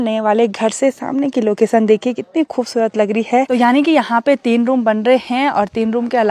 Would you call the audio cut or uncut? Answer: cut